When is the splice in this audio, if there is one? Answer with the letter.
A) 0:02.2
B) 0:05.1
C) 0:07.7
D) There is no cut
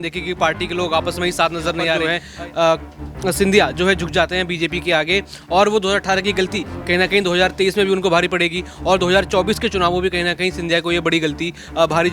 A